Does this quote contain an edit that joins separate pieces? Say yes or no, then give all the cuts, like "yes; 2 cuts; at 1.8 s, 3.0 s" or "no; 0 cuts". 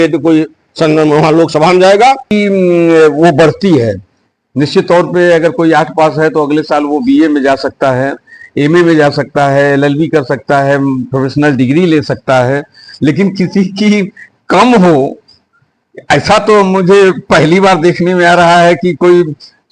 yes; 1 cut; at 2.3 s